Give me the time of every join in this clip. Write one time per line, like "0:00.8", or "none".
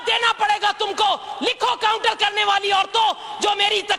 none